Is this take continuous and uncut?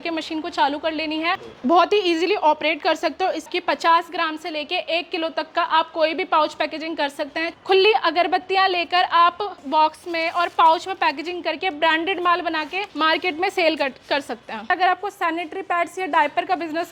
no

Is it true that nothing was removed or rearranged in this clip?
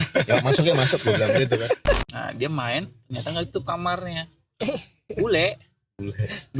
no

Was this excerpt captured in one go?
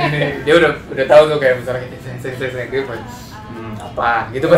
yes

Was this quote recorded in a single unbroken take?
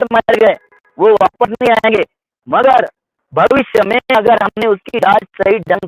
yes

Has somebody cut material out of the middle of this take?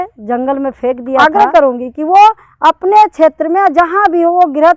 yes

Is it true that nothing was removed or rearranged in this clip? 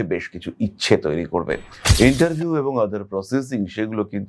no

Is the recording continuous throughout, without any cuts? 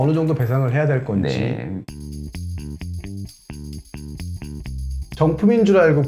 yes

